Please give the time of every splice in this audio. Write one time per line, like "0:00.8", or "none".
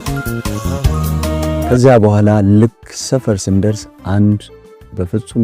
0:01.6